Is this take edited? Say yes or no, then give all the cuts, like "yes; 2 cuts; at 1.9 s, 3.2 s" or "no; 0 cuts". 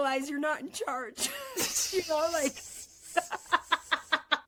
no; 0 cuts